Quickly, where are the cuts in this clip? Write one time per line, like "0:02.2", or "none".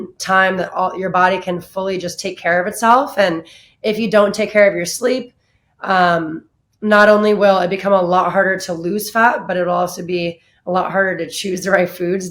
none